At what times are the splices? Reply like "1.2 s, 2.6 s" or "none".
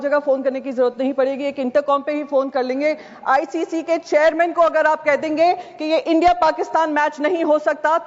none